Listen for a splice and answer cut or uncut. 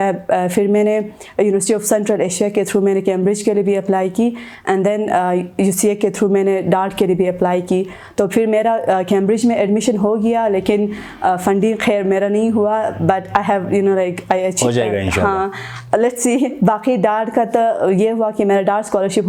uncut